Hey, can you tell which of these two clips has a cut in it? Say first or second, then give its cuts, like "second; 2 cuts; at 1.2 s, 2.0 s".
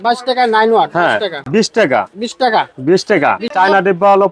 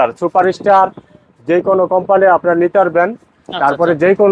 first; 2 cuts; at 1.3 s, 3.5 s